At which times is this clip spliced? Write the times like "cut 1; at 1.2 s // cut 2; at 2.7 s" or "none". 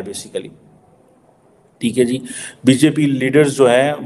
none